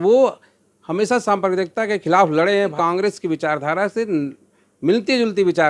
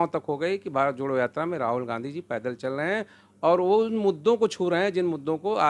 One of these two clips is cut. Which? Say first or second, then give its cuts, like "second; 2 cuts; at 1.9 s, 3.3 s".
first; 1 cut; at 2.7 s